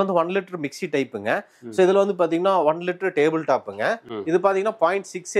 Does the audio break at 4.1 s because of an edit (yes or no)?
yes